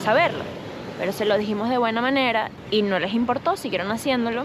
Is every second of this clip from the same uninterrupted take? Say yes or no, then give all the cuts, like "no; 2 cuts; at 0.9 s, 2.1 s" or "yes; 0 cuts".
no; 1 cut; at 2.6 s